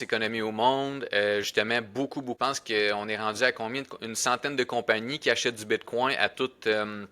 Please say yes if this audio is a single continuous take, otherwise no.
no